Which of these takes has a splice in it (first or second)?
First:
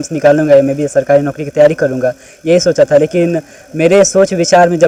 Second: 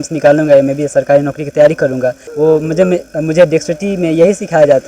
second